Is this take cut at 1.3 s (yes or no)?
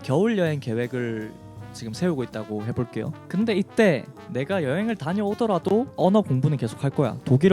no